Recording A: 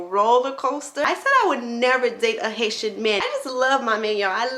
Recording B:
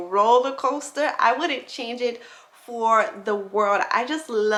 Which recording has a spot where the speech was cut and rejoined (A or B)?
A